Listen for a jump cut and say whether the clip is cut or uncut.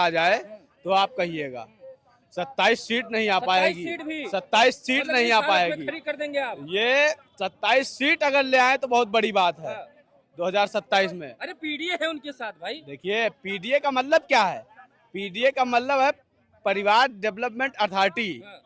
uncut